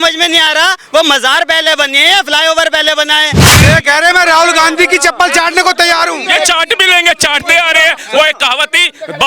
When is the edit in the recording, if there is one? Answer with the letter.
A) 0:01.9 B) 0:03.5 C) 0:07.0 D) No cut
B